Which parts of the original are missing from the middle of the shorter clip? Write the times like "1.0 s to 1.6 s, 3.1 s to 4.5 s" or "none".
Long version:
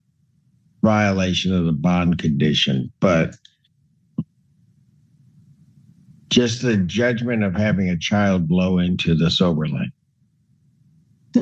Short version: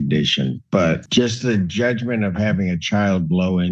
3.3 s to 6.2 s